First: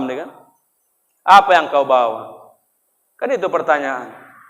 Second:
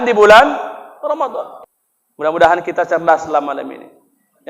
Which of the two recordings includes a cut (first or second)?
second